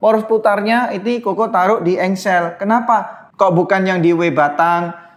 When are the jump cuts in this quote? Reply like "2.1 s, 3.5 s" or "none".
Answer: none